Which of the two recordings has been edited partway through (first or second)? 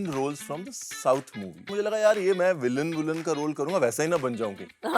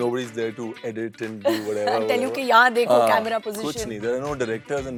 first